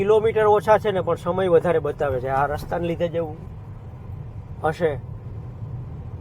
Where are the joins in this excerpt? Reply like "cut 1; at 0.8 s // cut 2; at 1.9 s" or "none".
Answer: none